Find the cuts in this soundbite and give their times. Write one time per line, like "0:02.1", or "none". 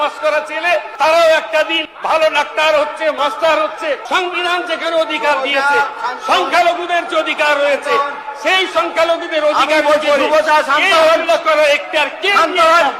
0:00.9
0:01.9
0:03.2
0:04.0